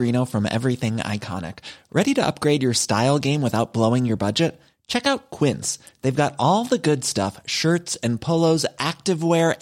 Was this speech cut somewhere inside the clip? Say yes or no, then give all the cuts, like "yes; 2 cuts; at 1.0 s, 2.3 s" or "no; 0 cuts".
no; 0 cuts